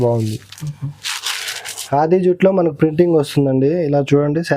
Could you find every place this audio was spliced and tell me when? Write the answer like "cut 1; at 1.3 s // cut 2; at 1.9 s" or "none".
cut 1; at 1.8 s

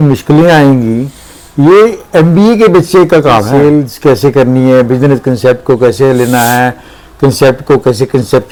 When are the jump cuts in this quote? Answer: none

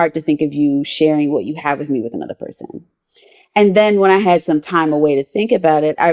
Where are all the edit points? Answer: none

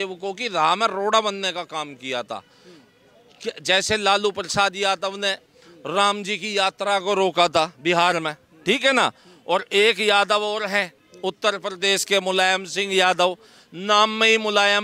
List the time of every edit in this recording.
none

